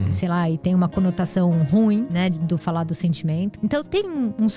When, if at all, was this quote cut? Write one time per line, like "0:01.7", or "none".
0:02.1
0:03.5